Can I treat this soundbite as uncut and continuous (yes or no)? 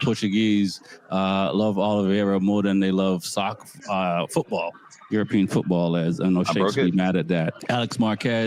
no